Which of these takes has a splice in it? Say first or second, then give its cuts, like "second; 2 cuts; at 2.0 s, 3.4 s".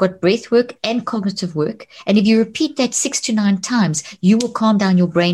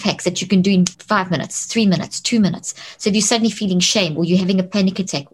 second; 1 cut; at 0.9 s